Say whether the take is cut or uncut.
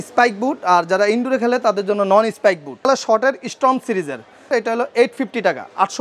cut